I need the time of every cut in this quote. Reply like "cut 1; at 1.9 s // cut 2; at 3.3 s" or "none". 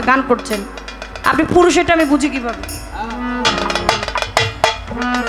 cut 1; at 3.5 s